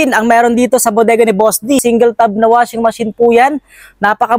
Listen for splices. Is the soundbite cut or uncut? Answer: cut